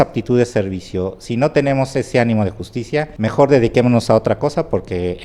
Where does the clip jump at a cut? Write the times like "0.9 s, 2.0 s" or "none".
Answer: none